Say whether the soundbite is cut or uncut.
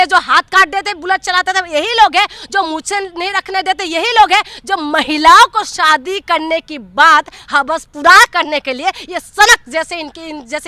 uncut